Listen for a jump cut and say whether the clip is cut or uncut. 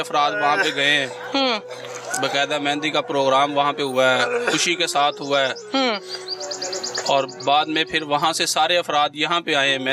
uncut